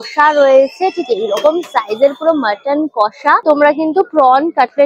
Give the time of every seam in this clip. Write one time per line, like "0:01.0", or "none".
0:03.4

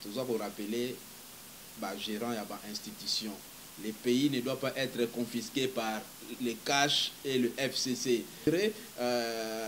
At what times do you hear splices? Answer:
0:08.5

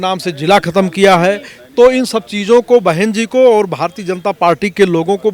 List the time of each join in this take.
none

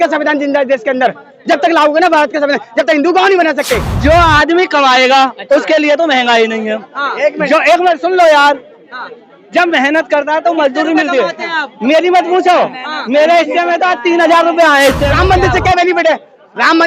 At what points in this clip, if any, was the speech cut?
0:03.9
0:15.1

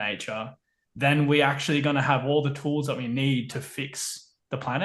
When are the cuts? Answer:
none

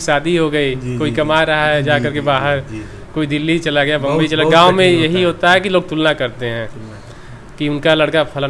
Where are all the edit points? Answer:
none

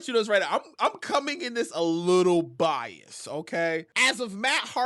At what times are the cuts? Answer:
0:03.9

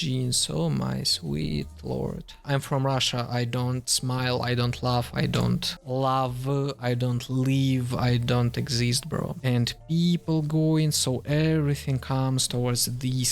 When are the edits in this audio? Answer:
0:02.4
0:09.4

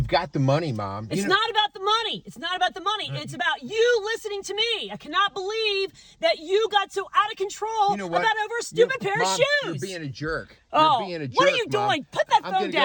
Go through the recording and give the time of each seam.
0:11.2

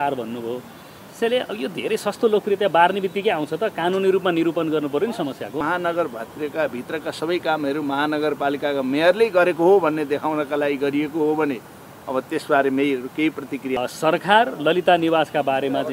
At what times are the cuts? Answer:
0:05.6
0:13.7

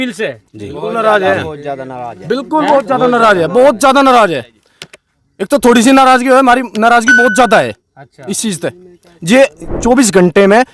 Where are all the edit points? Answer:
none

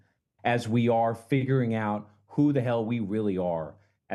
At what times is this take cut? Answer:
none

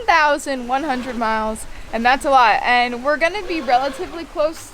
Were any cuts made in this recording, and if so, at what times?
0:01.7

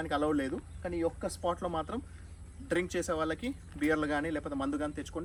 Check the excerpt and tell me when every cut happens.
none

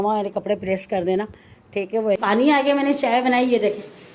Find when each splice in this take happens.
0:02.2

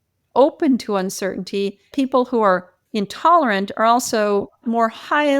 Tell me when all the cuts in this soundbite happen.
0:01.9
0:02.8

